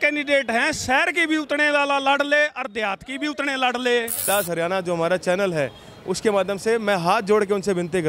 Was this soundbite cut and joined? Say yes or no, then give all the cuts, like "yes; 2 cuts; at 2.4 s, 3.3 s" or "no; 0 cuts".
yes; 1 cut; at 4.2 s